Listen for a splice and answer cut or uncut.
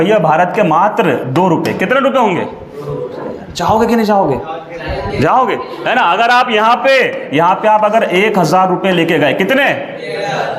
uncut